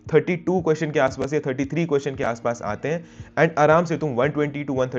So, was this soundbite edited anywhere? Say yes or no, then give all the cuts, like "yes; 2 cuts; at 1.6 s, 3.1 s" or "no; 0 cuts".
no; 0 cuts